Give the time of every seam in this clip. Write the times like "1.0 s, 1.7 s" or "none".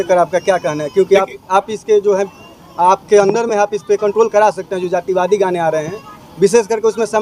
none